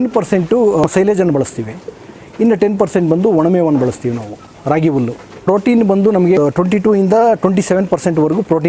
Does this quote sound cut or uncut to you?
cut